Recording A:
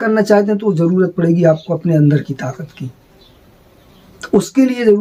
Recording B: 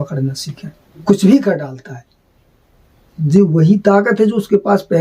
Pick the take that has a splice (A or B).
B